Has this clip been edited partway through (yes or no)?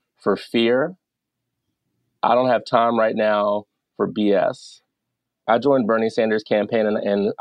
yes